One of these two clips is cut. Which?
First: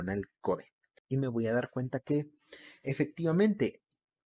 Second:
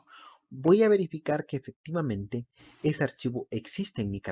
first; 1 cut; at 0.9 s

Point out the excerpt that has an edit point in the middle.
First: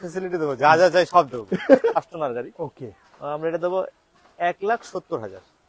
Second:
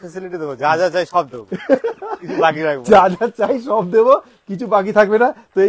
first; 1 cut; at 2.0 s

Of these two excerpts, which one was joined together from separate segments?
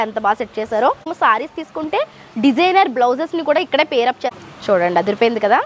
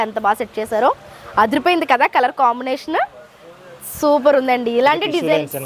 first; 2 cuts; at 1.1 s, 4.3 s

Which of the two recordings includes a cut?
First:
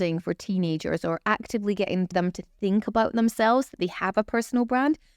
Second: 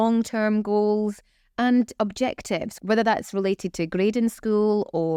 first; 1 cut; at 2.1 s

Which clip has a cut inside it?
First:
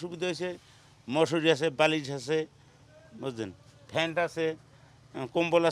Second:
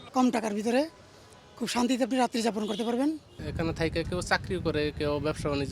second; 1 cut; at 3.3 s

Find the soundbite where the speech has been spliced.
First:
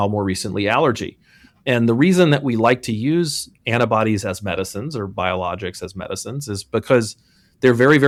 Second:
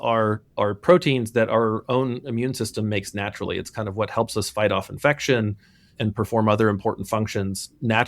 second; 1 cut; at 5.9 s

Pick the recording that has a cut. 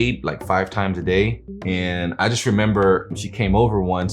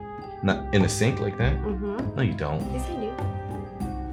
first; 2 cuts; at 1.5 s, 3.1 s

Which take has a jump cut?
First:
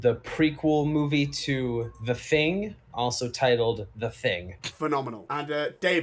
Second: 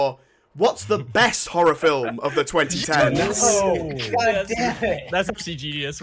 first; 2 cuts; at 4.6 s, 5.2 s

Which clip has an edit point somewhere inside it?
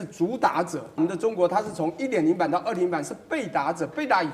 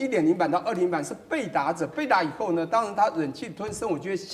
first; 1 cut; at 1.0 s

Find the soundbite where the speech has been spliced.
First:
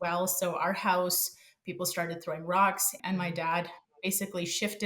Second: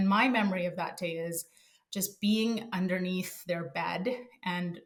first; 1 cut; at 2.9 s

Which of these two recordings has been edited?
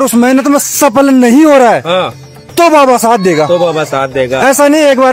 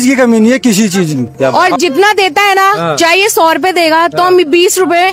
second; 1 cut; at 1.5 s

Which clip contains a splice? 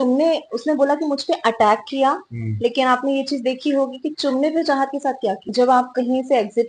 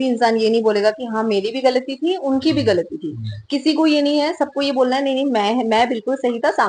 first; 1 cut; at 5.4 s

